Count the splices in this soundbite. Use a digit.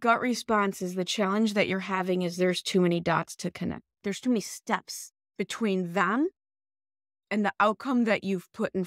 1